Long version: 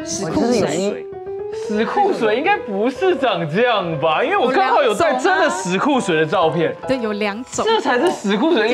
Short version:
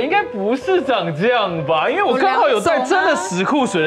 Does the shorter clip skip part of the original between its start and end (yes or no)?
no